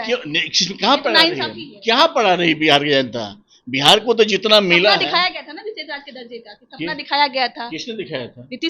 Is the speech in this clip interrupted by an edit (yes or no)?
no